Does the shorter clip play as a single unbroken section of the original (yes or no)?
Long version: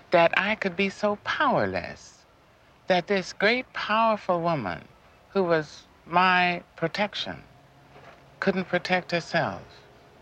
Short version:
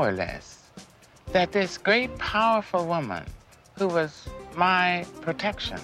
yes